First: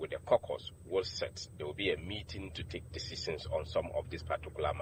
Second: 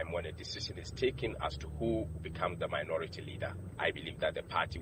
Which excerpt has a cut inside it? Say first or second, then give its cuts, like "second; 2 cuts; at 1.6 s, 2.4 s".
second; 1 cut; at 3.6 s